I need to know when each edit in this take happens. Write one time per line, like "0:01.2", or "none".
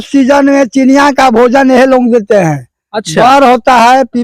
none